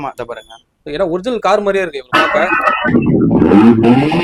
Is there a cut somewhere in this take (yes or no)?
no